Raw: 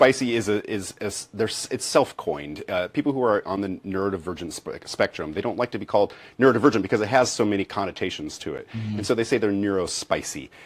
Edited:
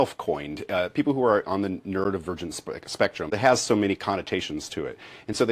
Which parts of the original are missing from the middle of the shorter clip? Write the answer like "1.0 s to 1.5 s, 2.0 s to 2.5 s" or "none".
5.3 s to 7.0 s